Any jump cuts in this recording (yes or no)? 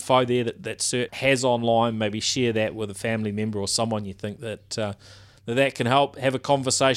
yes